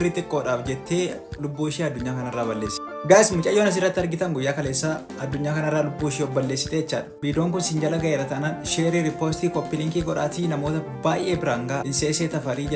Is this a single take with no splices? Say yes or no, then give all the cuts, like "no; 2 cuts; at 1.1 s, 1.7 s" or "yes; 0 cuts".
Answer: yes; 0 cuts